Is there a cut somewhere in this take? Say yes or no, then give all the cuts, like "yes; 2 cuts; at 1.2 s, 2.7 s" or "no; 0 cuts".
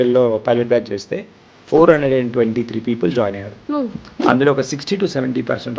no; 0 cuts